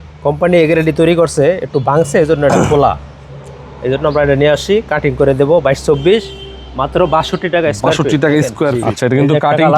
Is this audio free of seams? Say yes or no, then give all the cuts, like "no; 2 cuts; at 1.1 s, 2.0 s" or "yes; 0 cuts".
no; 1 cut; at 8.8 s